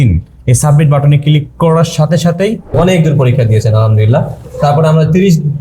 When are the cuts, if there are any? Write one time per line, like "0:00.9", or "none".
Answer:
0:02.7

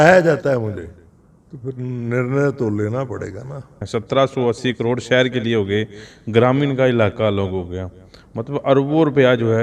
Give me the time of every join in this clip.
0:03.8

